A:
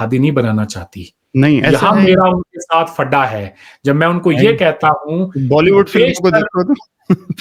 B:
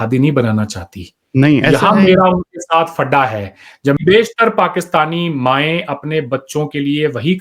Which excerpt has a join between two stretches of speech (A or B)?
B